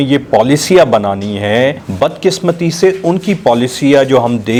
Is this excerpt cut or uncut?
uncut